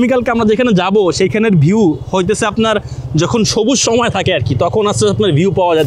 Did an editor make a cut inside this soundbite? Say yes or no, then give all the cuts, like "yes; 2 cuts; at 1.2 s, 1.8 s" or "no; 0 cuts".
no; 0 cuts